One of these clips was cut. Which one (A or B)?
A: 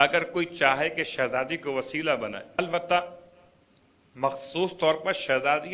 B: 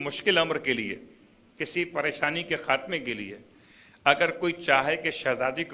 A